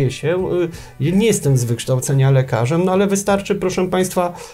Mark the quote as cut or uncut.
uncut